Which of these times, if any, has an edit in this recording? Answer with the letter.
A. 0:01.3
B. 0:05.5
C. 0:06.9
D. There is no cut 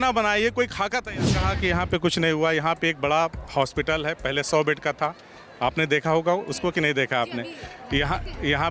A